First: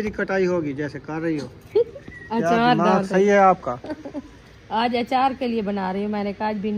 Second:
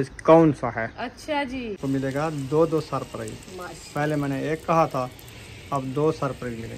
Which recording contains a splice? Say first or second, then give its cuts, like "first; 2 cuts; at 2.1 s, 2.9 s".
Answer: second; 1 cut; at 1.8 s